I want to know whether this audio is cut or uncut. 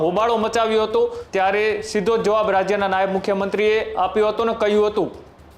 cut